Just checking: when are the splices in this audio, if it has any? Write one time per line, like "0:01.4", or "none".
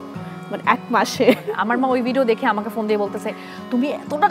0:01.5